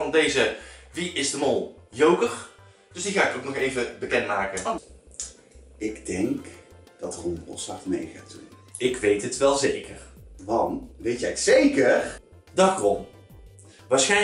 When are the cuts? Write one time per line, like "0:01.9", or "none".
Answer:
0:04.9
0:12.2